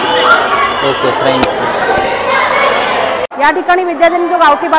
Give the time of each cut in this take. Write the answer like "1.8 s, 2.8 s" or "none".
3.3 s